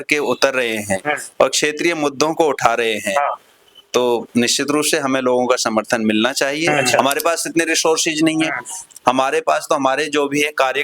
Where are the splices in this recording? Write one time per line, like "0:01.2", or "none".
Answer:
0:06.8